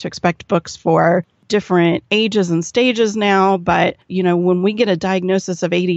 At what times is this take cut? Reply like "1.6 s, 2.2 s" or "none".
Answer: 4.0 s